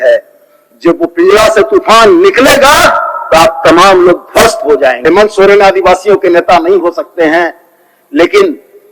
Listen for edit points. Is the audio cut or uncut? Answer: cut